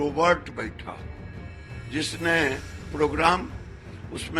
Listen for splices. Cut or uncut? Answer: uncut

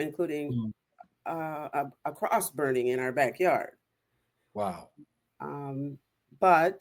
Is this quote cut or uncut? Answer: uncut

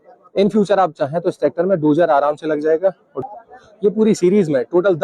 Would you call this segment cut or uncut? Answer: cut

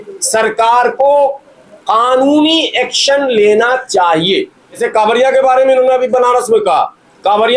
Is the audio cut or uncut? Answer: cut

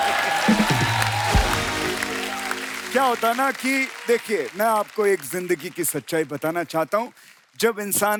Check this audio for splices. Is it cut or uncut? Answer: uncut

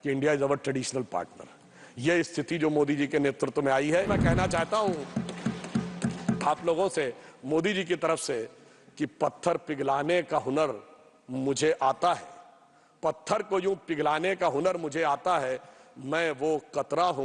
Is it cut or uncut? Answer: cut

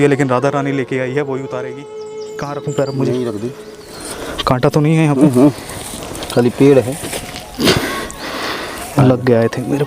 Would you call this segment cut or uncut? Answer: cut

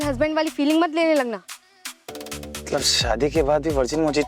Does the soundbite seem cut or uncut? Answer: uncut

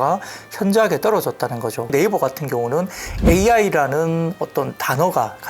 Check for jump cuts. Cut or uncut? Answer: cut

